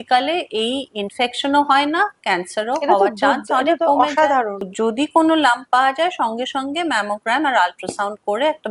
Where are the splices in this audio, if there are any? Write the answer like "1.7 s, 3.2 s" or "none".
4.6 s